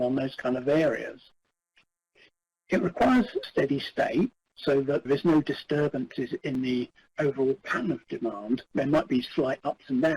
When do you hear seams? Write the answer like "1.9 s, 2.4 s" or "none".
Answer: 3.4 s, 5.0 s